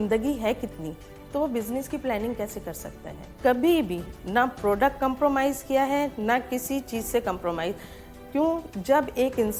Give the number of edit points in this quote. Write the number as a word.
one